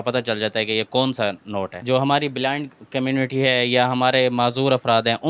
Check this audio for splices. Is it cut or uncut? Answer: cut